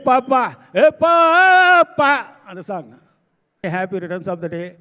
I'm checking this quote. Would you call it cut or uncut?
cut